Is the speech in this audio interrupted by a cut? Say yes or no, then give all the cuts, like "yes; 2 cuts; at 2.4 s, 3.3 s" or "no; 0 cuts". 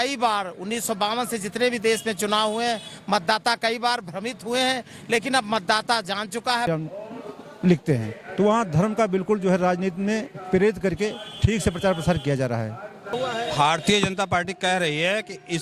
yes; 2 cuts; at 6.7 s, 13.1 s